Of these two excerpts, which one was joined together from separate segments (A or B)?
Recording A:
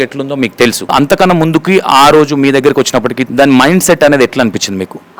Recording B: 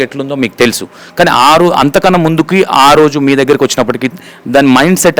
A